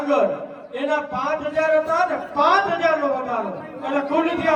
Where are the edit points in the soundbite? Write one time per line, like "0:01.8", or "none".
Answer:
none

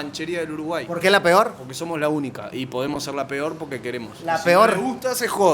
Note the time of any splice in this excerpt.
0:04.1

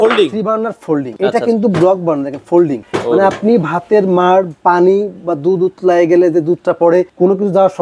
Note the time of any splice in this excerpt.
none

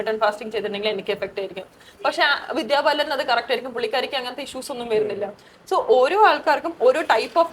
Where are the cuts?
none

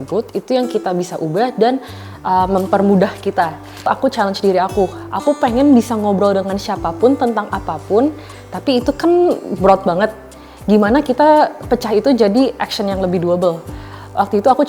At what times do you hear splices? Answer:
0:03.9

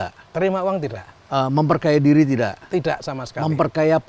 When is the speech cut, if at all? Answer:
none

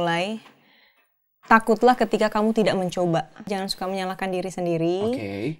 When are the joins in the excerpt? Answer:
0:03.5

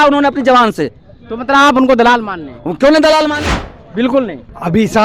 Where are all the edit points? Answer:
0:03.5

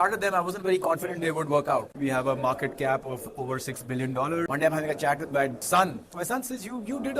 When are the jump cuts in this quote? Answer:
0:01.9
0:04.5

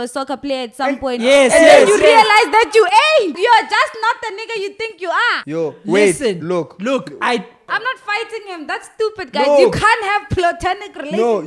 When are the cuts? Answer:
0:03.3
0:05.4
0:07.7

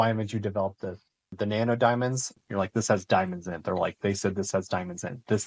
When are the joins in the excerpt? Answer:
0:01.3
0:02.3

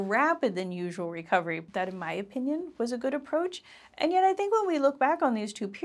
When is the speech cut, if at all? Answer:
0:01.6

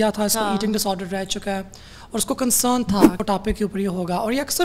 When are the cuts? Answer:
0:03.2

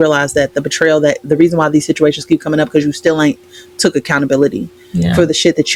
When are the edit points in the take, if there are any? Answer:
none

